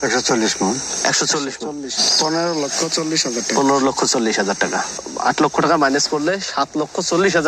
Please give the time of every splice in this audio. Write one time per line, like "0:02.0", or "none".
0:01.9